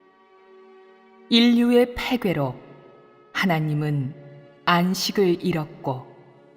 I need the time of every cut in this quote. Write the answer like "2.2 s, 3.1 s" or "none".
2.5 s